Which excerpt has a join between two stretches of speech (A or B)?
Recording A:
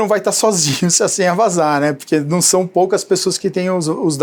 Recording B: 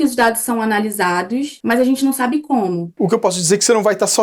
B